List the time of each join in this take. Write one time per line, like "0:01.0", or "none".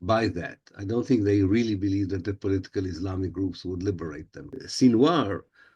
0:04.7